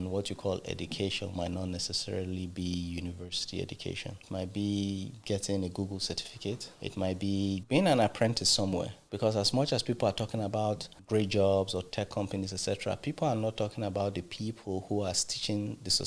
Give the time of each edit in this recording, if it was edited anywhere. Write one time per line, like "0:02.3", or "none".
0:04.2
0:06.7
0:07.6
0:09.0
0:10.9